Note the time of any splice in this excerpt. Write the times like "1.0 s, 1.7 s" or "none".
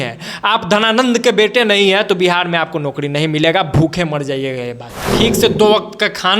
5.0 s